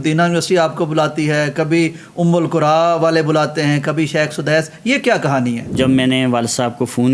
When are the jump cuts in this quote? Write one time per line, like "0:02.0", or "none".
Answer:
0:05.8